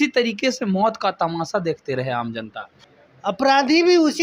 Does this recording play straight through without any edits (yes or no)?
no